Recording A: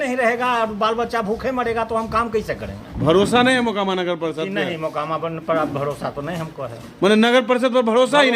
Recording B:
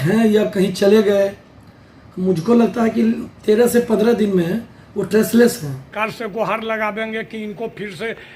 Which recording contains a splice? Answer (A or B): B